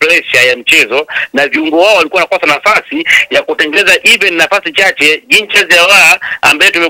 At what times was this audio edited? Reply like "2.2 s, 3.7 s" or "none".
none